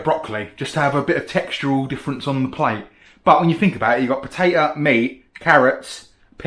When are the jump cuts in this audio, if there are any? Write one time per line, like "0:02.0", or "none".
none